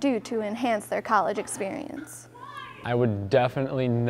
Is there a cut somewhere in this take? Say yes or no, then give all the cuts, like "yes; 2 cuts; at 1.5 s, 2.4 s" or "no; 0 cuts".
no; 0 cuts